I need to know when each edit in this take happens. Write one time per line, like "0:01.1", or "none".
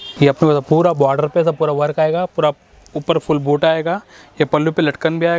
none